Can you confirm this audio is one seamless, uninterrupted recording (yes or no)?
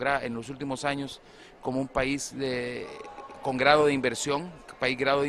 no